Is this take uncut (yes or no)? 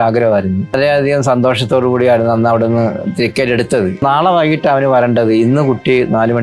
no